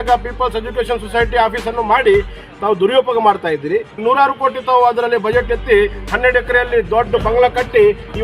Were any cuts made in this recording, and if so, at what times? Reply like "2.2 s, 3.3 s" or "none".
4.0 s

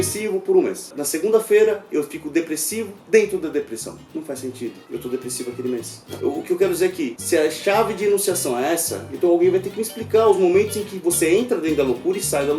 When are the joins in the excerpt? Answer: 6.0 s, 7.2 s

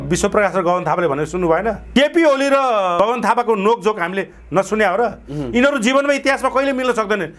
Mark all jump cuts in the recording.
1.8 s

